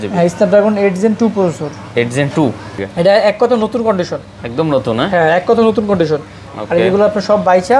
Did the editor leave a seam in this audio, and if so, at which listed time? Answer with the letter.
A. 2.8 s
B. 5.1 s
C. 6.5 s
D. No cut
A